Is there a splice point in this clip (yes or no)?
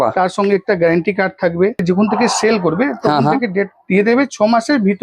yes